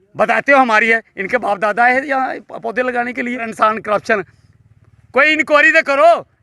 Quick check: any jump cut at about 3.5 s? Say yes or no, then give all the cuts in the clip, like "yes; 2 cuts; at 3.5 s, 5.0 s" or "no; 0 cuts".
yes; 1 cut; at 3.5 s